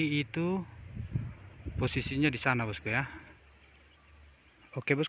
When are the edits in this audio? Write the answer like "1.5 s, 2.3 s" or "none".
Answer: 3.4 s